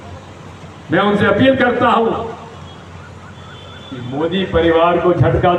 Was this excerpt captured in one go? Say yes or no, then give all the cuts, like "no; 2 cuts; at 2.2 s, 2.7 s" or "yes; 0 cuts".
yes; 0 cuts